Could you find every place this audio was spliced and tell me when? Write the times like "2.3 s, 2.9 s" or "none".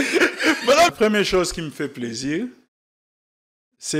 0.9 s